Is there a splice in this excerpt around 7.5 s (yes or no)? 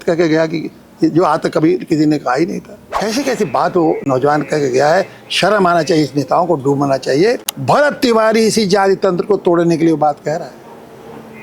yes